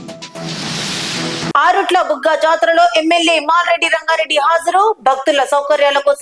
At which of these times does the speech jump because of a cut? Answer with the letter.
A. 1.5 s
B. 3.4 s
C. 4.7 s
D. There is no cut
A